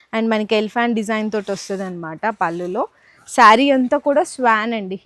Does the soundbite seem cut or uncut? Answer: uncut